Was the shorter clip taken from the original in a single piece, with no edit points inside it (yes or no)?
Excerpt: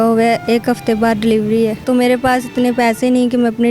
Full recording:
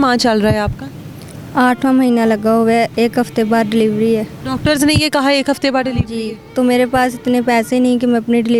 no